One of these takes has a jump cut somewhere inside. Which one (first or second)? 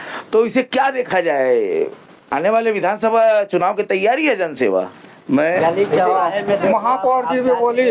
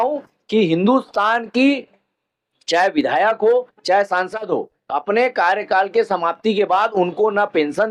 first